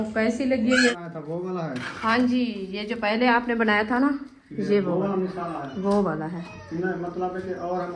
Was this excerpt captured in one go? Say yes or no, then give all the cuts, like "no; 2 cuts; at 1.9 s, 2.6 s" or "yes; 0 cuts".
no; 1 cut; at 0.9 s